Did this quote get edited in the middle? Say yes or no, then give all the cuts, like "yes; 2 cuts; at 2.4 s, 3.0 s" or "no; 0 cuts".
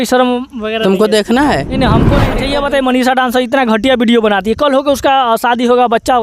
yes; 1 cut; at 2.2 s